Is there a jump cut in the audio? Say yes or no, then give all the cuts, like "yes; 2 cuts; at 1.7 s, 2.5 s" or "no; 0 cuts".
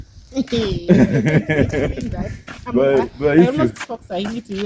no; 0 cuts